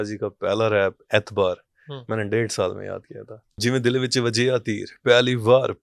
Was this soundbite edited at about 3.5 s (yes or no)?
yes